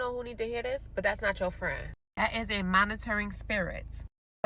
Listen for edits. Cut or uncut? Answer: uncut